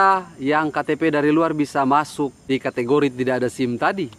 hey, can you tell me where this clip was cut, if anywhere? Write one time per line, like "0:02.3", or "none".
0:02.4